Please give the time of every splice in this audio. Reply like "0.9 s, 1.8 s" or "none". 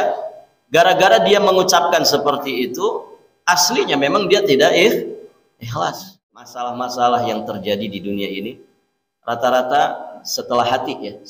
6.6 s

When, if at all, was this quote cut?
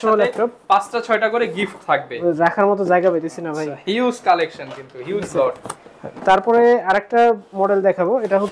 none

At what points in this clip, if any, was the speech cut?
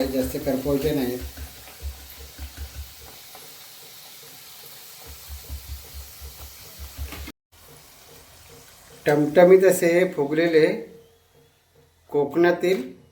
7.1 s

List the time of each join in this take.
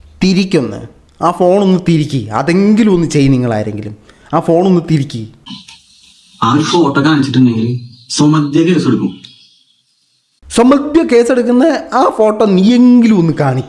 5.4 s

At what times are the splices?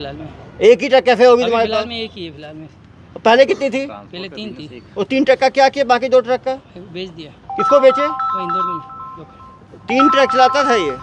none

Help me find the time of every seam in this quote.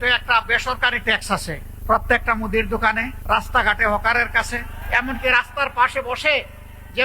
1.7 s, 3.1 s, 4.8 s

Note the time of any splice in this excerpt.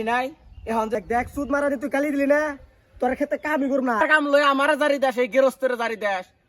1.0 s, 4.0 s

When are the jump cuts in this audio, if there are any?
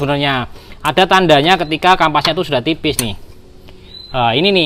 none

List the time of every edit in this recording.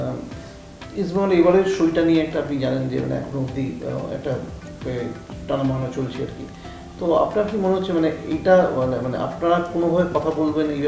none

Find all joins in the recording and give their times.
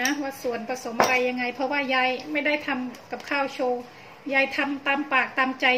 none

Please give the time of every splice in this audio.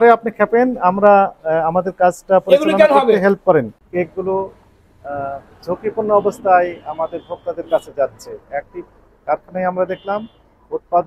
3.8 s

